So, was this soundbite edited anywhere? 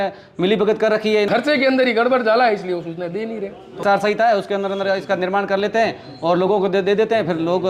yes; 2 cuts; at 1.3 s, 3.8 s

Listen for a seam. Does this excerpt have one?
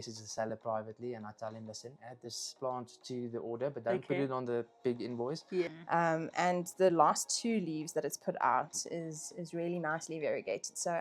yes; 1 cut; at 5.7 s

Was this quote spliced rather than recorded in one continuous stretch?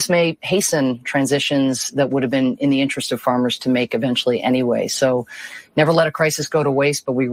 no; 0 cuts

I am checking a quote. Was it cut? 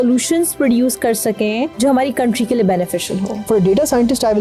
yes; 2 cuts; at 1.7 s, 3.5 s

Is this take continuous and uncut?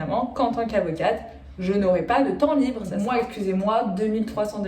no; 1 cut; at 2.9 s

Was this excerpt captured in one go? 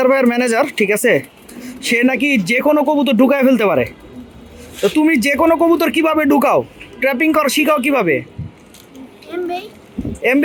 yes; 0 cuts

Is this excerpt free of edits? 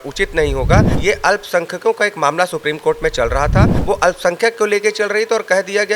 no; 2 cuts; at 0.9 s, 3.8 s

